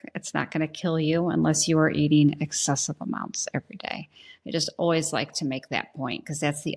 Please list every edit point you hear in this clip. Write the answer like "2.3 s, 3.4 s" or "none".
none

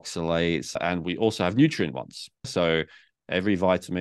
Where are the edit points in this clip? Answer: 0.8 s, 2.5 s

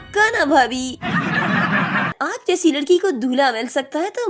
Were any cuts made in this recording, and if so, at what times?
2.1 s

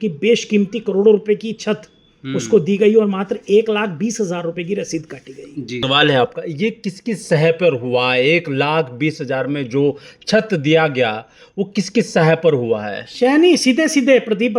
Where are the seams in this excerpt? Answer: 5.8 s

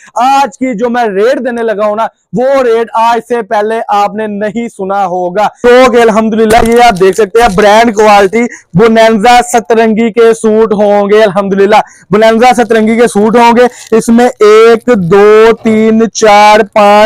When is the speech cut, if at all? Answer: 5.6 s

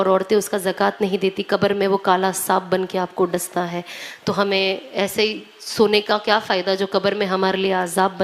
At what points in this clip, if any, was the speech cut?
none

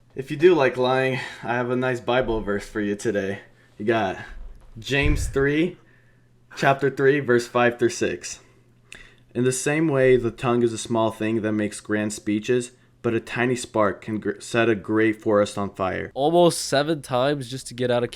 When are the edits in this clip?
16.0 s

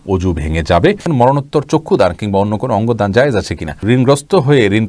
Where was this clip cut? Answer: 1.0 s, 3.8 s

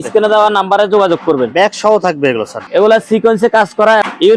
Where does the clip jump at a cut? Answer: none

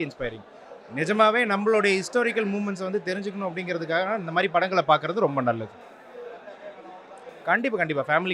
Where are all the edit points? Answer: none

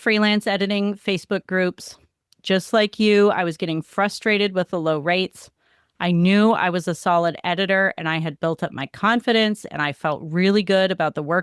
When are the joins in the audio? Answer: none

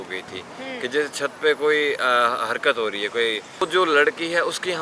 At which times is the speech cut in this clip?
3.7 s

